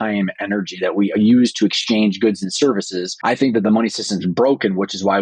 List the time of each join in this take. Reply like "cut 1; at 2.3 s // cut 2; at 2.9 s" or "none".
cut 1; at 3.0 s